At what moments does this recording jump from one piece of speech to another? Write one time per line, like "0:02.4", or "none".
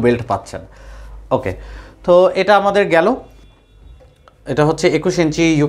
none